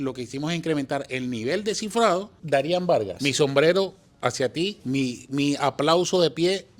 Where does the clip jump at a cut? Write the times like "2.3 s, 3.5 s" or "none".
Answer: 2.3 s, 3.1 s, 4.8 s

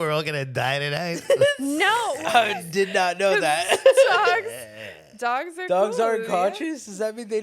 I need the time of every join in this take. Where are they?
2.2 s

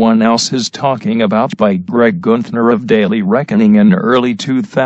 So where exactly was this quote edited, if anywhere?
1.0 s

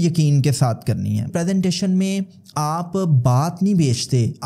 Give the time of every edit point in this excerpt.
1.3 s

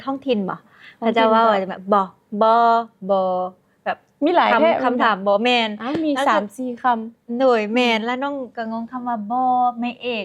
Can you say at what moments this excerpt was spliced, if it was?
none

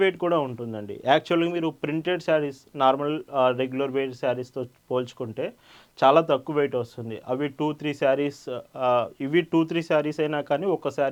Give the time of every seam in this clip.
none

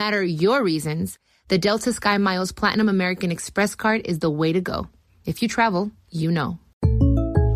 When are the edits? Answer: 6.7 s

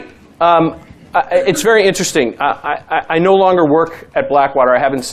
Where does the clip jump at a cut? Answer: 1.3 s

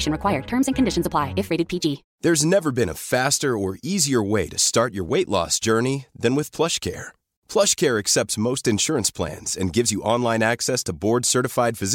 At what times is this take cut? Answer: 2.1 s

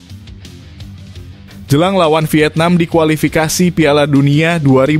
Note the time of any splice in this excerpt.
1.7 s

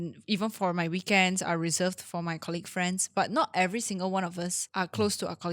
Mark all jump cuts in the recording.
4.6 s

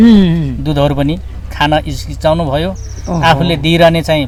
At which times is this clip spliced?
none

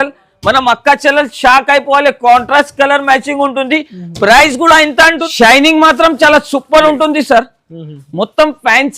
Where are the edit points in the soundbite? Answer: 5.2 s

